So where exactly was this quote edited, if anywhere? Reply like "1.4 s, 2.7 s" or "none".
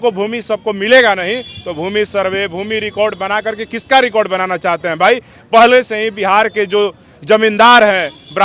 none

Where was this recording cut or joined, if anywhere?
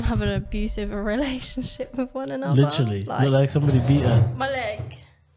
none

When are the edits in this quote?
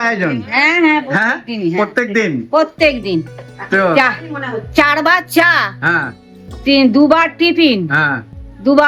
none

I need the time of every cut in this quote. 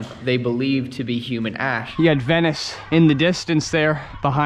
1.8 s

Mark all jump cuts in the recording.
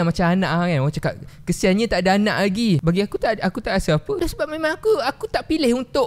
2.8 s, 4.2 s

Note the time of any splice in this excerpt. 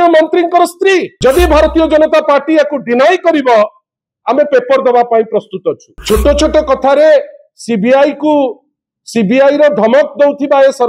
1.1 s, 5.9 s

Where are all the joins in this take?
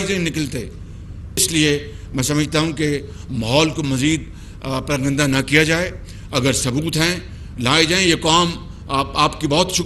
1.4 s

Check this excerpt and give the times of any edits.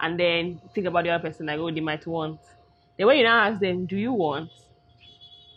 none

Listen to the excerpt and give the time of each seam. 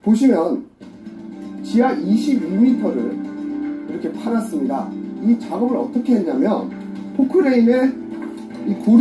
2.6 s

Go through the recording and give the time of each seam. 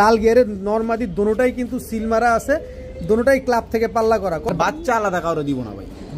4.5 s

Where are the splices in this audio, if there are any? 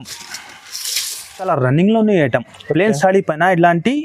1.5 s

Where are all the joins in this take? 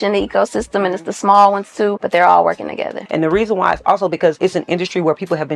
2.0 s, 3.0 s, 4.4 s

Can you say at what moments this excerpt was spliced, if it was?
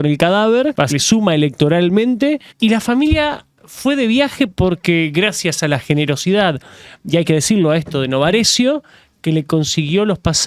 0.9 s, 2.5 s

